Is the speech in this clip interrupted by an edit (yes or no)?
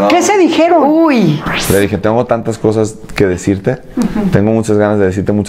yes